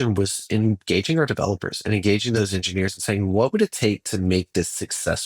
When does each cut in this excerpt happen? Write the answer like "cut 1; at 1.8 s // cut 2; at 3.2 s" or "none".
cut 1; at 2.4 s